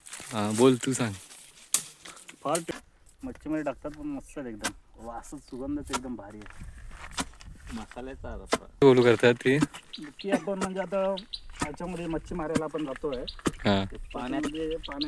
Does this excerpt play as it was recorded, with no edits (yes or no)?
no